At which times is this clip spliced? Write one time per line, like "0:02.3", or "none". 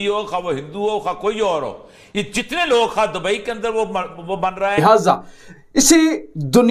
0:04.8